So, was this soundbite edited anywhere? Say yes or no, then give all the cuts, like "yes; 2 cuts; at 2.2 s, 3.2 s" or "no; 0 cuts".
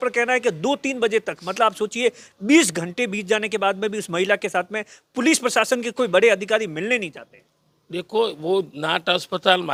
no; 0 cuts